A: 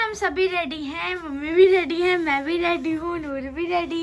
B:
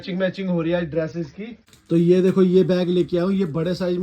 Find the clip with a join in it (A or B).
B